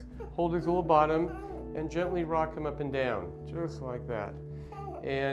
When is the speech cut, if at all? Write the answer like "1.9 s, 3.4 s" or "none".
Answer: 2.6 s